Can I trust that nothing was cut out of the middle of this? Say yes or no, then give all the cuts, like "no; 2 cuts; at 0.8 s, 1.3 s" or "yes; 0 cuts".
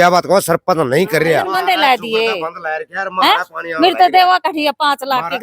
no; 1 cut; at 1.6 s